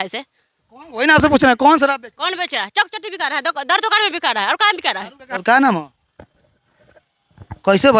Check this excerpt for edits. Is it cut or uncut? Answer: cut